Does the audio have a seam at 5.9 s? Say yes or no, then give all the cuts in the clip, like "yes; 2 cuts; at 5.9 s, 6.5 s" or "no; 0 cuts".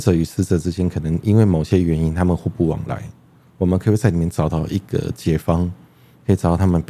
no; 0 cuts